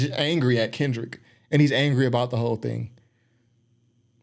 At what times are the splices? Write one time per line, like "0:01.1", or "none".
none

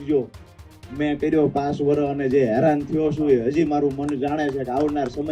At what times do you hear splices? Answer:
none

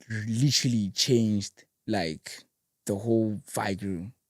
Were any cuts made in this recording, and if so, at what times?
none

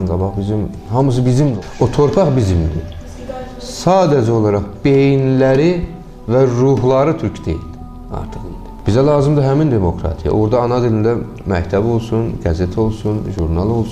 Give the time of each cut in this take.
0:01.5
0:08.7

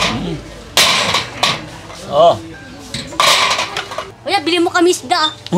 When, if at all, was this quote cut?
0:04.1

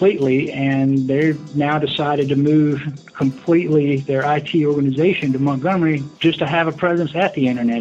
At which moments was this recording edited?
0:06.1

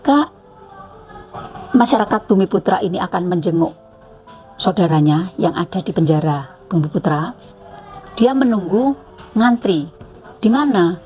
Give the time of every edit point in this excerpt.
none

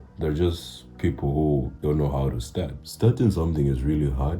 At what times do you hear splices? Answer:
0:01.7
0:02.8

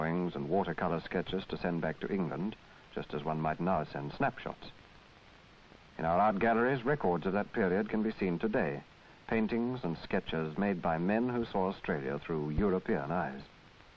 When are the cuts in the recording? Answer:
0:07.2

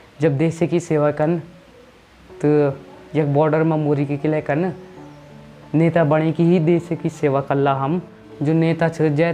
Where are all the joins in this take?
0:08.2

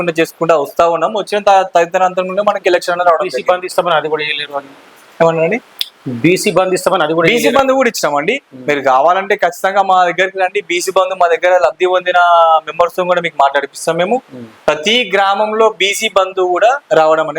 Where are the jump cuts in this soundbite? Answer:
none

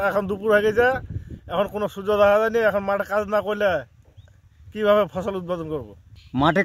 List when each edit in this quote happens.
none

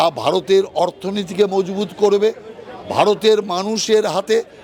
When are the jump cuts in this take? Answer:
none

